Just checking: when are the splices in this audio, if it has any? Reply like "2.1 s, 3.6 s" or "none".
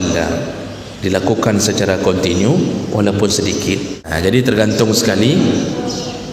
4.1 s